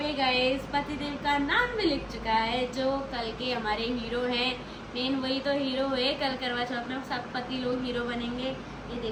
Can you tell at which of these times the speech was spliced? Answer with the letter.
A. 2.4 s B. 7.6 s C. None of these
C